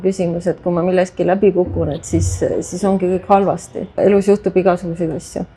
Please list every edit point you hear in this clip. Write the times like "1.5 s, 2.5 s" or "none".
4.0 s